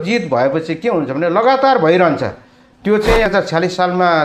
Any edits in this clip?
yes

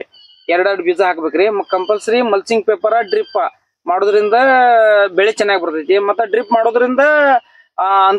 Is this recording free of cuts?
yes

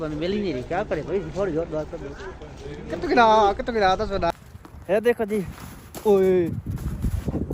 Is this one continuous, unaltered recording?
no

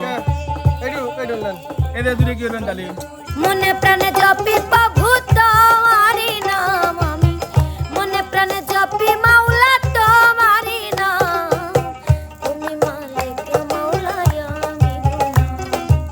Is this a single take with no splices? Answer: no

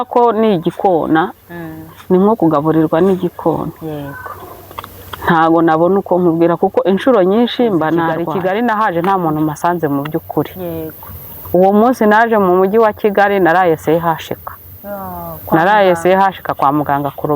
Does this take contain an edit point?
yes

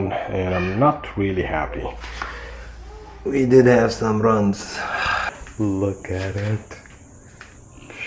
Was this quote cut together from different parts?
yes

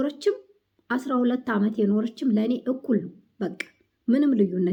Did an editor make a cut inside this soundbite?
no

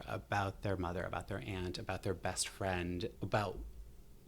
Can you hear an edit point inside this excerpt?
yes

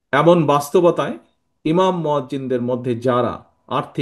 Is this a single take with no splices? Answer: yes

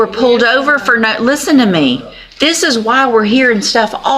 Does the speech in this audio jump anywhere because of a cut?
no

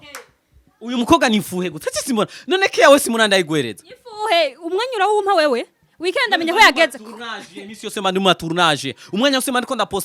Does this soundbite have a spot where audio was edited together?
no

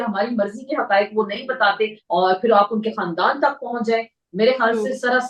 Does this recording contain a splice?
yes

